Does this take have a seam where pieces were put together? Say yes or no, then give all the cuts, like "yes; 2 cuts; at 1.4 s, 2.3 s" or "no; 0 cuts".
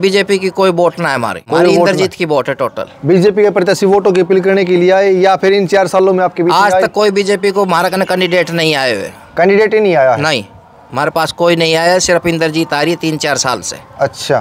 no; 0 cuts